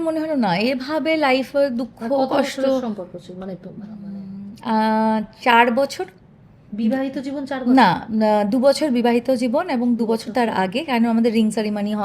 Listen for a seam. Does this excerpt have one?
no; 0 cuts

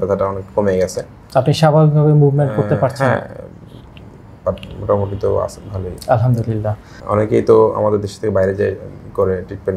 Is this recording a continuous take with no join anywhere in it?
no; 1 cut; at 6.9 s

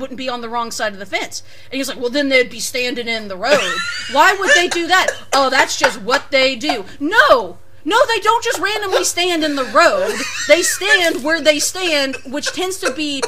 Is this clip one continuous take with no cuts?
yes; 0 cuts

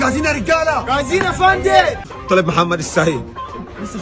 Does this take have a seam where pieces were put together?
yes; 1 cut; at 2.1 s

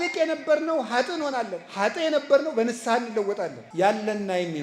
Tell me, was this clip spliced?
yes; 1 cut; at 3.6 s

